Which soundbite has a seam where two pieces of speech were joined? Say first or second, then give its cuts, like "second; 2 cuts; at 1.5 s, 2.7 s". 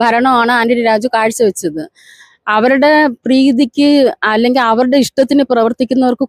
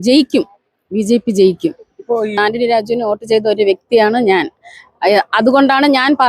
second; 1 cut; at 2.4 s